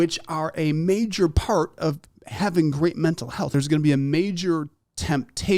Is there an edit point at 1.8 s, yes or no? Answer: no